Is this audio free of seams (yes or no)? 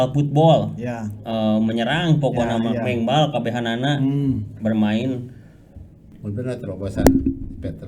no